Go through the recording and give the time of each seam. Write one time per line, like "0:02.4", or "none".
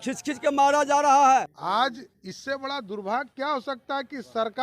0:01.6